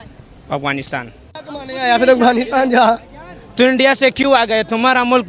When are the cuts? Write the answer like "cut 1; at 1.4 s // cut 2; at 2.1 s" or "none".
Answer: cut 1; at 1.3 s